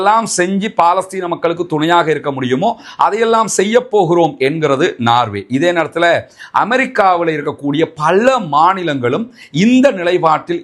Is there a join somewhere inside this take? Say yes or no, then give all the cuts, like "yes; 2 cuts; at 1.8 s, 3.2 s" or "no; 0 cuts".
no; 0 cuts